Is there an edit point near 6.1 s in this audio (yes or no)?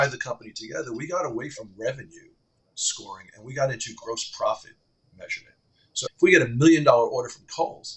yes